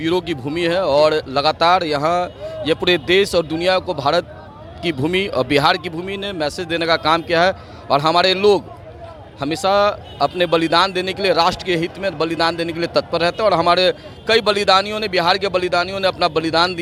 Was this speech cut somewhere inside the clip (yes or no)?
no